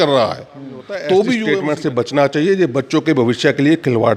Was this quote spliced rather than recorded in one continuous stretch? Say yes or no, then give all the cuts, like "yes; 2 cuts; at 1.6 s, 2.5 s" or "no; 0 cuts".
yes; 1 cut; at 1.5 s